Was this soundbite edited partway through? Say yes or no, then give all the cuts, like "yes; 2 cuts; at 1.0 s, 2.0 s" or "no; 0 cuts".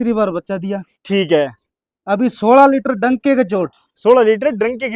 no; 0 cuts